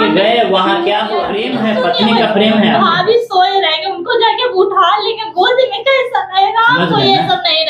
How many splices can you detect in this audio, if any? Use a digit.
1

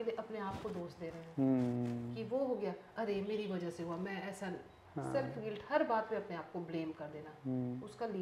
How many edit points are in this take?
1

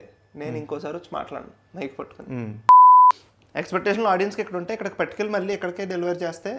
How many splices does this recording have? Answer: 2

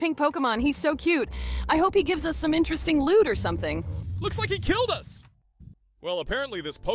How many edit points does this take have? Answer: 0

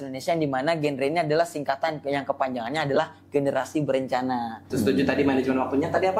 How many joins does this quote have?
1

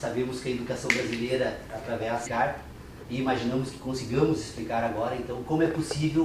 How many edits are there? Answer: 0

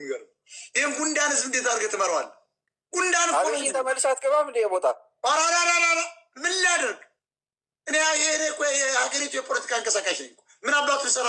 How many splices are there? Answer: 0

